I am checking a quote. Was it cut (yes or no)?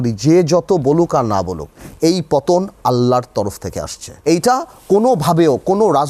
yes